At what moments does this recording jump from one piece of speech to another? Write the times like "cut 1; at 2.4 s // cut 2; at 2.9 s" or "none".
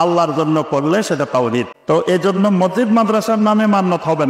cut 1; at 1.7 s